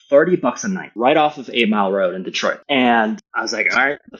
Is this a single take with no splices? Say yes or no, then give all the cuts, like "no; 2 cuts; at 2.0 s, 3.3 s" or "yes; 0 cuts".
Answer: no; 2 cuts; at 0.9 s, 2.6 s